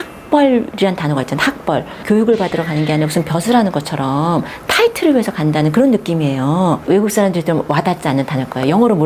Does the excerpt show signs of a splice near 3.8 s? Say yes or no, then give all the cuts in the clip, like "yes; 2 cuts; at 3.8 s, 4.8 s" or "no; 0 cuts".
no; 2 cuts; at 1.9 s, 6.8 s